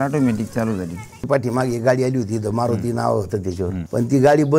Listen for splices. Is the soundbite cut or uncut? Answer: cut